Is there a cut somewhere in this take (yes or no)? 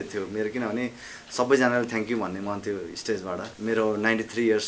yes